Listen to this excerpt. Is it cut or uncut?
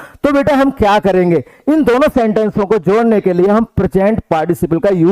uncut